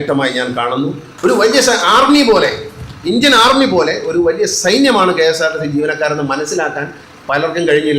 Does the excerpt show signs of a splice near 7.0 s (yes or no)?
no